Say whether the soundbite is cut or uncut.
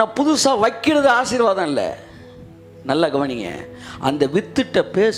uncut